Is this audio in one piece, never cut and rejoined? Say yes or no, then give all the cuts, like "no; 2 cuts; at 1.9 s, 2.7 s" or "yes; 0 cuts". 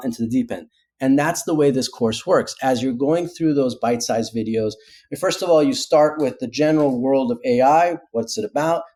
yes; 0 cuts